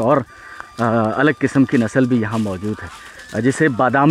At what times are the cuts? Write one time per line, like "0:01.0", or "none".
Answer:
none